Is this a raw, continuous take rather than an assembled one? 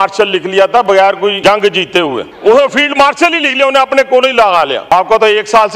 no; 3 cuts; at 1.4 s, 2.3 s, 4.9 s

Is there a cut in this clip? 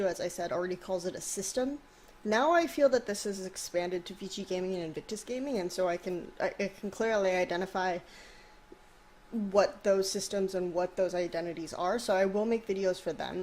yes; 1 cut; at 8.0 s

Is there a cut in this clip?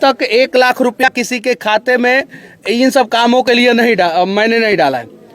yes; 1 cut; at 1.1 s

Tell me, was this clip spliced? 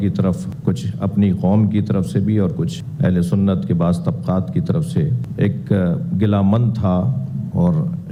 no; 0 cuts

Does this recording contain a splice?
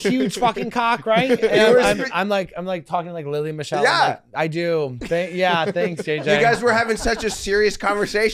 no; 0 cuts

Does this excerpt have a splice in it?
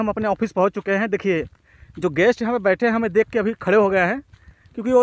no; 0 cuts

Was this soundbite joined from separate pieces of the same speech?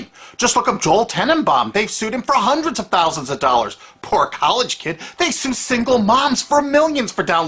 no; 0 cuts

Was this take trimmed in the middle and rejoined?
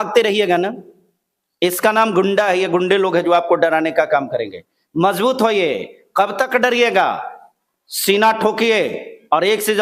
no; 0 cuts

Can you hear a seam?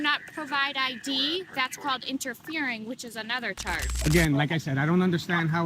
yes; 1 cut; at 3.9 s

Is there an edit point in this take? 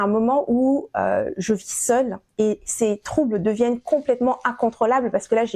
no; 0 cuts

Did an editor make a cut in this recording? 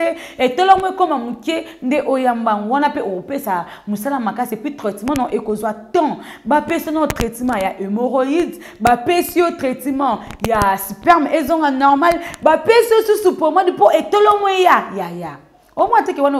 no; 0 cuts

